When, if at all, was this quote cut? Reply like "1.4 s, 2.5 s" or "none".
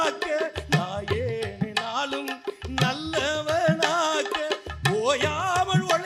none